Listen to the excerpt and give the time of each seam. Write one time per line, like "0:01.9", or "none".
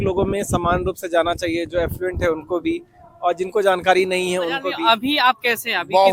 0:04.7